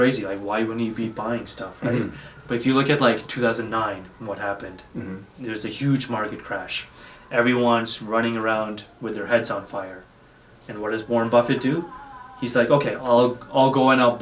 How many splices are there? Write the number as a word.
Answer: zero